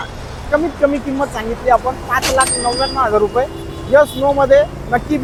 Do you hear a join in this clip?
no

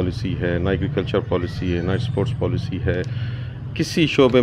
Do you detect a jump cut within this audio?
no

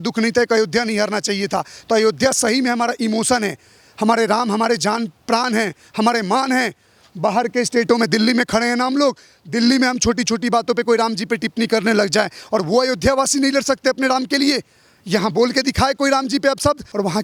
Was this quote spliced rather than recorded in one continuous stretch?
no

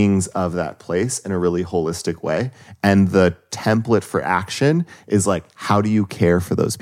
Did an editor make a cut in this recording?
no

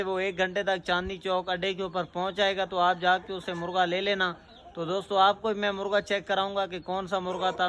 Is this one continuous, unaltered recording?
yes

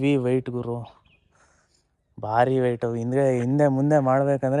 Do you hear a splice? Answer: no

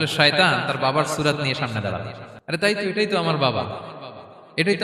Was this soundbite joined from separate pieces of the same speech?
yes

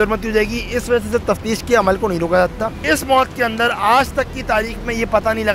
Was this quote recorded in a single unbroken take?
no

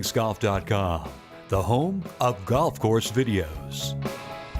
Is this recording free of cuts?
no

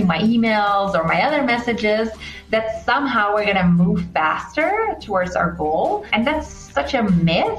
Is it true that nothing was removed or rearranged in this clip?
no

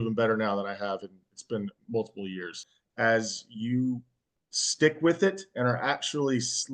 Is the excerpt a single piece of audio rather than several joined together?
no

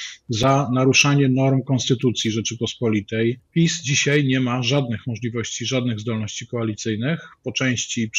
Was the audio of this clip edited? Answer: yes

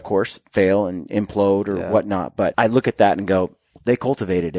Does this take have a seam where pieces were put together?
yes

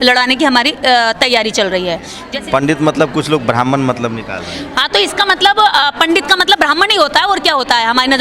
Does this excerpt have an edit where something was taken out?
yes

